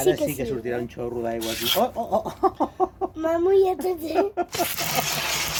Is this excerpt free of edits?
yes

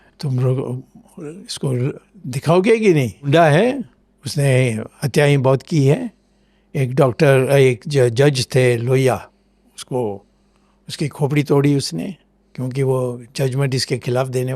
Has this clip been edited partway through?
no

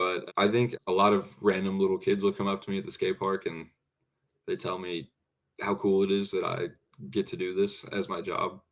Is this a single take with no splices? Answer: yes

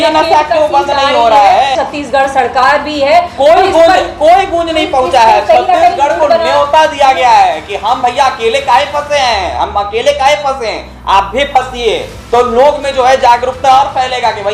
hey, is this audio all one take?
no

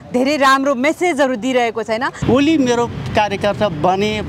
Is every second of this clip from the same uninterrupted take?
no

